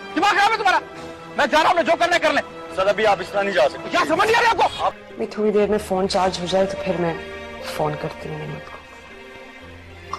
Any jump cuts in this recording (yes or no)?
yes